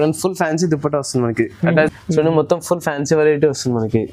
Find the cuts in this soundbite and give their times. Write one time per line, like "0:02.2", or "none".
0:01.9